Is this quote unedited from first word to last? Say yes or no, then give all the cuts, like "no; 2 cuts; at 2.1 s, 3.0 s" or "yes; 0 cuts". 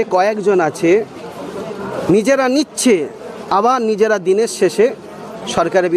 yes; 0 cuts